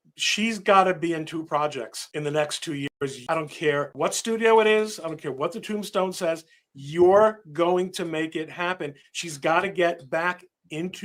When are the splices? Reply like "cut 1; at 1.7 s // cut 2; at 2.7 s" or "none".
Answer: none